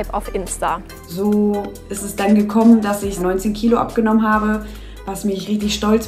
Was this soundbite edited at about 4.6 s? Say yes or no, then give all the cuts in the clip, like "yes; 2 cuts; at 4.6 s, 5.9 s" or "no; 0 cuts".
no; 0 cuts